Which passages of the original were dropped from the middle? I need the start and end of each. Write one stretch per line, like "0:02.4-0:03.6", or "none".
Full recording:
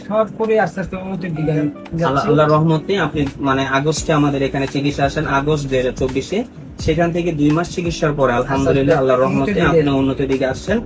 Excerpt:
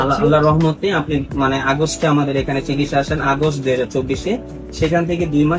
none